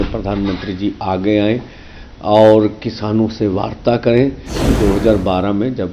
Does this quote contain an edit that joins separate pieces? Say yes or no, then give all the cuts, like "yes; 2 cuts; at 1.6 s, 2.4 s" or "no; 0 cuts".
yes; 1 cut; at 4.7 s